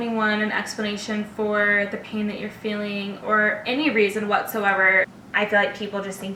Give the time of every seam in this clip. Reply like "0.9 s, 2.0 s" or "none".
5.1 s